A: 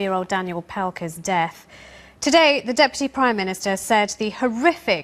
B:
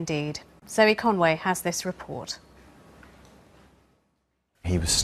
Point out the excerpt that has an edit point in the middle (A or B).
A